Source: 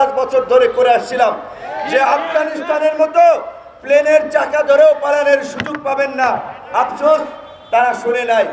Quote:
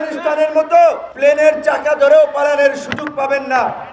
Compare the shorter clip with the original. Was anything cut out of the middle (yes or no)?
yes